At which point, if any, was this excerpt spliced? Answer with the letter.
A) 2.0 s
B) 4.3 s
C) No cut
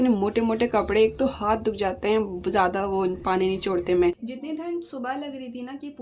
B